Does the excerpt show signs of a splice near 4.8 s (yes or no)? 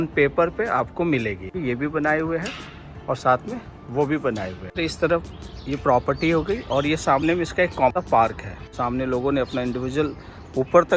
yes